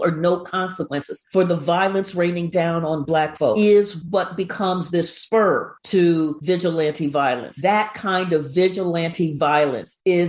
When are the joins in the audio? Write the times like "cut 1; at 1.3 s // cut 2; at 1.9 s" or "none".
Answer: cut 1; at 3.6 s // cut 2; at 7.5 s